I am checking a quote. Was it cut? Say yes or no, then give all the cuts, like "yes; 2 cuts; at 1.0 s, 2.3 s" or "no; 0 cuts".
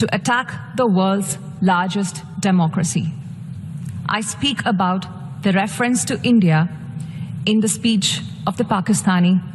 no; 0 cuts